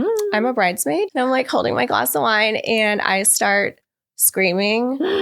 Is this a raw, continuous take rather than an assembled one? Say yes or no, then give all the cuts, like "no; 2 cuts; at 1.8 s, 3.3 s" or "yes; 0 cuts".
no; 1 cut; at 1.1 s